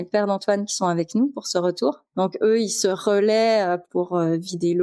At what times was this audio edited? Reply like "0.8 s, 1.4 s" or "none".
none